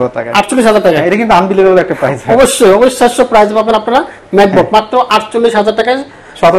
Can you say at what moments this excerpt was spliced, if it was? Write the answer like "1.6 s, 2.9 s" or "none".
none